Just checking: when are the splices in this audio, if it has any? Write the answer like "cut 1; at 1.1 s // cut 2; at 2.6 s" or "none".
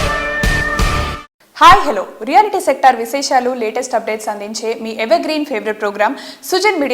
cut 1; at 1.1 s